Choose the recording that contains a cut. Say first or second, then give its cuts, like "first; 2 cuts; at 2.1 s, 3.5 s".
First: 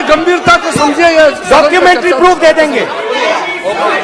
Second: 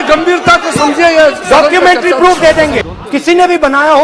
second; 1 cut; at 2.9 s